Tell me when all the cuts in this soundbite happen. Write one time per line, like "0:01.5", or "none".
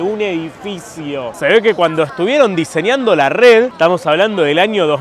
none